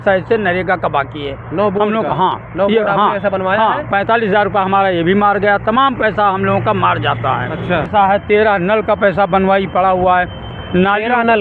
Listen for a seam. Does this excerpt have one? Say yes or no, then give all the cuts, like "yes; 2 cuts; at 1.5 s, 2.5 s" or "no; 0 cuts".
yes; 1 cut; at 7.9 s